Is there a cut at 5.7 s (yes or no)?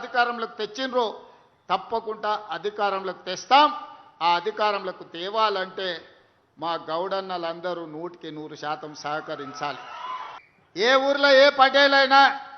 no